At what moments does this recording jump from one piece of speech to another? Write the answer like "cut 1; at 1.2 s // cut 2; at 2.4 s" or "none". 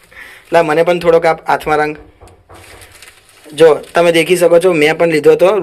none